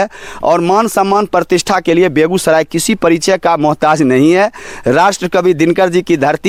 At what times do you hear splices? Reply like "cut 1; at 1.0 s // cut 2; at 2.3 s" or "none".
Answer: none